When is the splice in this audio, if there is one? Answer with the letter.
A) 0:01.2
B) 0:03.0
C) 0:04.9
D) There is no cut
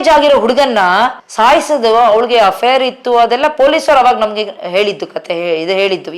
A